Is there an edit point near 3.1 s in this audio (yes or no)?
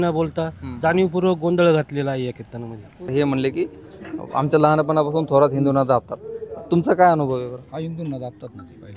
yes